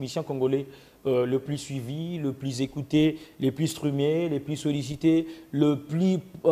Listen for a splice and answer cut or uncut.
uncut